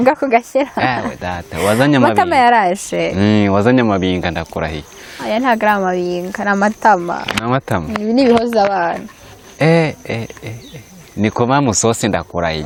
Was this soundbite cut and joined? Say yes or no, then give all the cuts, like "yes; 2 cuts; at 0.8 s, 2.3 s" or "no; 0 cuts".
no; 0 cuts